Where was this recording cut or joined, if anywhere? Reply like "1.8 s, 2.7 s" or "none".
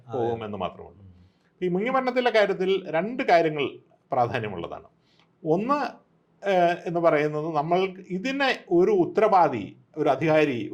none